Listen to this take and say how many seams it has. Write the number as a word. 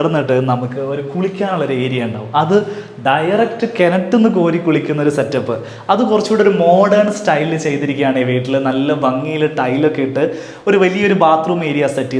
zero